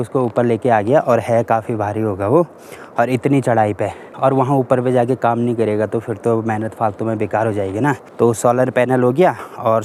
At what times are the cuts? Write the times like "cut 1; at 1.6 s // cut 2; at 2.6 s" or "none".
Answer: none